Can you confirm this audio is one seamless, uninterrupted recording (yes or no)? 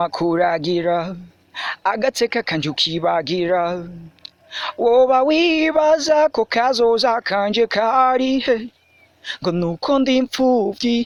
yes